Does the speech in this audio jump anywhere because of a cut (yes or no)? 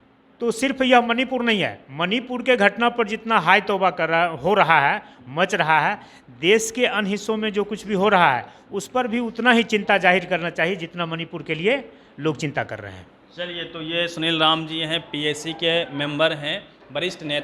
no